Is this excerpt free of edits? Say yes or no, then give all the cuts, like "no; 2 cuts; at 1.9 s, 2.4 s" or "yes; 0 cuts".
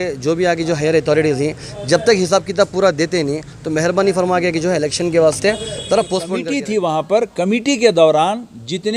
no; 1 cut; at 6.3 s